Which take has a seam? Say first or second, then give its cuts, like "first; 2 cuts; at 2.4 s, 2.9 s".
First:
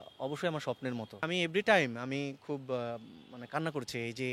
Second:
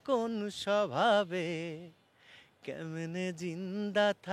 first; 1 cut; at 1.2 s